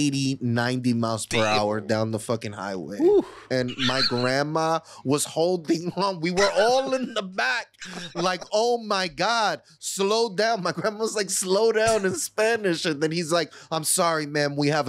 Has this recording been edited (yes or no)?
no